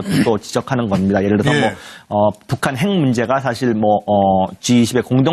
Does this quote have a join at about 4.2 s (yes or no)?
yes